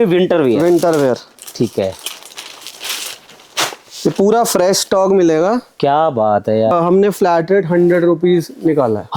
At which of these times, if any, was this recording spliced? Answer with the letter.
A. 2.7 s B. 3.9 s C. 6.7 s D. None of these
C